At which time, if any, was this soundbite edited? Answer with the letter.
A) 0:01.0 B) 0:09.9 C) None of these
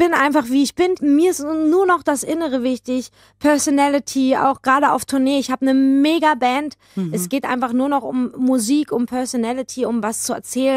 A